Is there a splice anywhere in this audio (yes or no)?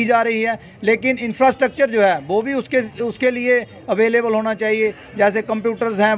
no